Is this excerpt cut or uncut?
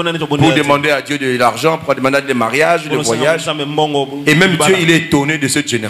uncut